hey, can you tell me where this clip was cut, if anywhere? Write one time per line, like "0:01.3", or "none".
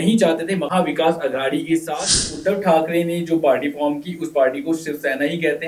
0:02.4